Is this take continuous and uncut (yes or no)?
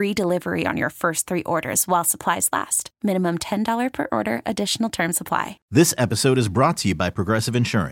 no